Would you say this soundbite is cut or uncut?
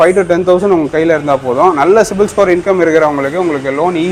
uncut